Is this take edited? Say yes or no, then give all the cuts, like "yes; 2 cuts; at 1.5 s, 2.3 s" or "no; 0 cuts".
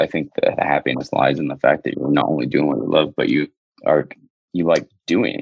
yes; 1 cut; at 4.3 s